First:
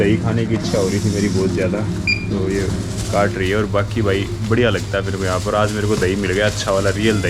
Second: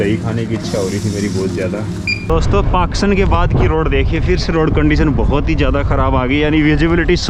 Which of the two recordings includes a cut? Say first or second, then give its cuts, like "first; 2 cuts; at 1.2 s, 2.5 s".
second; 1 cut; at 2.2 s